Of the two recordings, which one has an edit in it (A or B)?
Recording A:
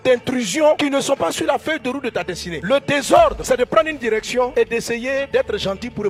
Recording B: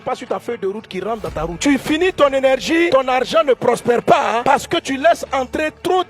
B